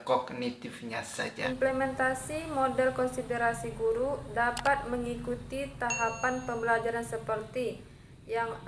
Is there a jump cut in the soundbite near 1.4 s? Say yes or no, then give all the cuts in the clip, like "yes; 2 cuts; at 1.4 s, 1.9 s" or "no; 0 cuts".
yes; 1 cut; at 1.4 s